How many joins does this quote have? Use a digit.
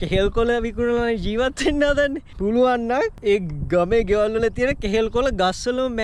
2